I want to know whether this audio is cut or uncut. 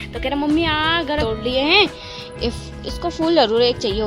cut